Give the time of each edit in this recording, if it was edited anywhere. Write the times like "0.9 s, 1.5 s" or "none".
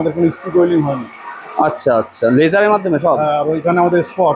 none